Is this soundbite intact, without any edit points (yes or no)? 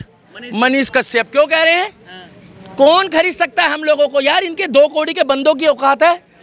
yes